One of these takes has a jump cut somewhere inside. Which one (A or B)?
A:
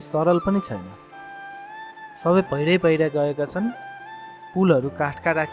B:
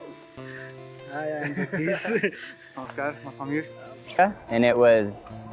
B